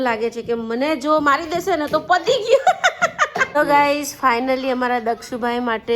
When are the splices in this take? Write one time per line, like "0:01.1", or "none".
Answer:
0:03.4